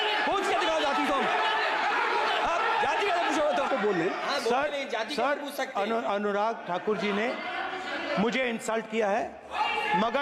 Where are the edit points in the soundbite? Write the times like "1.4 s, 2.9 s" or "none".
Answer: 3.7 s